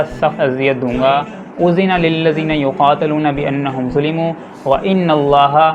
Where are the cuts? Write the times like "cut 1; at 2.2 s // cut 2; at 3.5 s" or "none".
cut 1; at 1.4 s